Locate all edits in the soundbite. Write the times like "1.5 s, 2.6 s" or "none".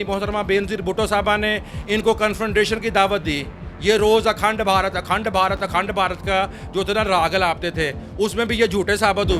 none